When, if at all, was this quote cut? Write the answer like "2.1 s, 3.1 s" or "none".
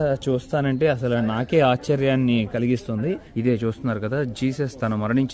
3.3 s